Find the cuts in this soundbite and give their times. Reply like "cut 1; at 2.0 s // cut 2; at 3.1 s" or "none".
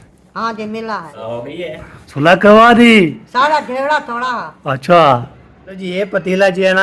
cut 1; at 1.1 s // cut 2; at 5.8 s